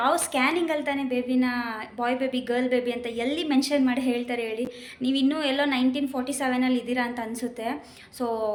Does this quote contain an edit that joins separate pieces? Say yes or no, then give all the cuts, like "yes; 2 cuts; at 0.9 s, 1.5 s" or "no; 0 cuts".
no; 0 cuts